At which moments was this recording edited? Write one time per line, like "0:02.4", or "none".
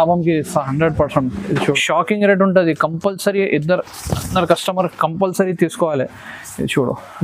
0:01.6